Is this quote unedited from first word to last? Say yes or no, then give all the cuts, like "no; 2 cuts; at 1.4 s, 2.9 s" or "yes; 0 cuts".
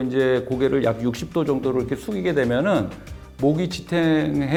yes; 0 cuts